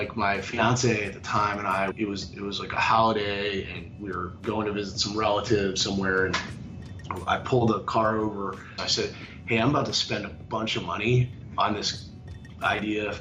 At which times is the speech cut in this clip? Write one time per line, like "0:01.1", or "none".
0:01.9
0:08.8
0:11.3